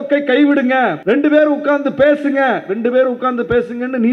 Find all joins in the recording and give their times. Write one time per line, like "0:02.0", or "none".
0:01.0